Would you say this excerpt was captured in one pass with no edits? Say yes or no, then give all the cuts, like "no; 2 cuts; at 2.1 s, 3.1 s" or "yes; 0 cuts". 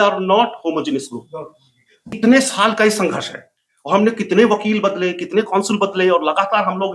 no; 1 cut; at 2.2 s